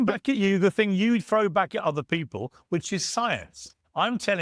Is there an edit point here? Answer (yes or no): no